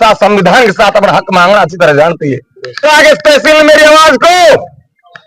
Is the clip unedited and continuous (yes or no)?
no